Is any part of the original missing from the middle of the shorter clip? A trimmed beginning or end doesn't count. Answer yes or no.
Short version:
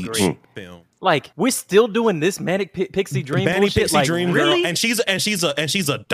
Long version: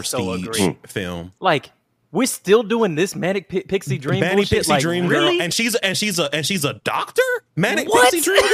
yes